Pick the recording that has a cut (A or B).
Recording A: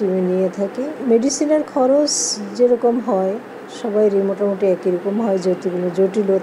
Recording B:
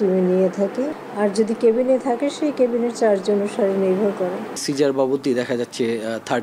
B